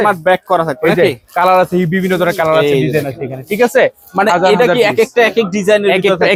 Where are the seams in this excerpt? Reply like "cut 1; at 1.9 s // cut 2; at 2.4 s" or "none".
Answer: none